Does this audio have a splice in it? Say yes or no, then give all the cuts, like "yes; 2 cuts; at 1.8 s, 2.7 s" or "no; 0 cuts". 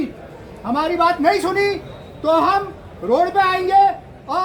no; 0 cuts